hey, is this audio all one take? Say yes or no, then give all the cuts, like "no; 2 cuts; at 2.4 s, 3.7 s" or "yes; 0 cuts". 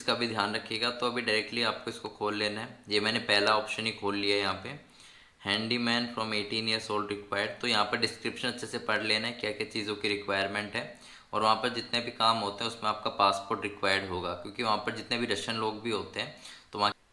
yes; 0 cuts